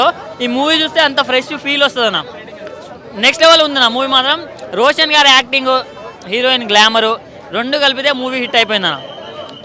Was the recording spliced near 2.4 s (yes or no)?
no